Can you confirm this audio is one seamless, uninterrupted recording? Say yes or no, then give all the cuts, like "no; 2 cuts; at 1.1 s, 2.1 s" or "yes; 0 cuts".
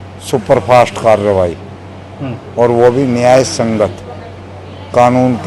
yes; 0 cuts